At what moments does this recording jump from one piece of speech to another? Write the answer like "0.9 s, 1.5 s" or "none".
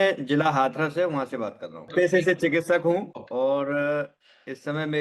1.9 s, 3.1 s